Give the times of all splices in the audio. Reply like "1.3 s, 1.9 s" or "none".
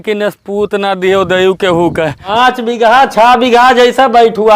2.3 s